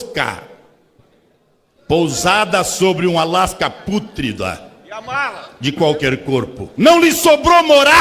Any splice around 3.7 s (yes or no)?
no